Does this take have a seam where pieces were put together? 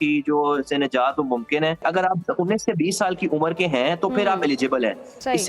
yes; 1 cut; at 1.8 s

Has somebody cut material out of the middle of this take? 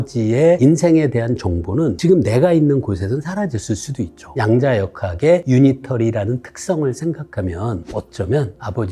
yes; 3 cuts; at 4.2 s, 5.4 s, 7.8 s

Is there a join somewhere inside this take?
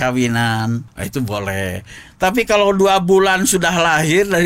yes; 1 cut; at 0.9 s

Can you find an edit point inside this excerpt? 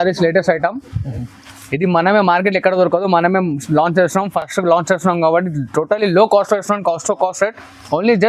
no; 0 cuts

